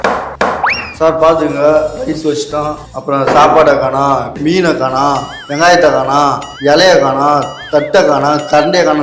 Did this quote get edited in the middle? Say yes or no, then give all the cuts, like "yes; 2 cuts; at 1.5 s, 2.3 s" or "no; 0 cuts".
yes; 2 cuts; at 2.9 s, 4.3 s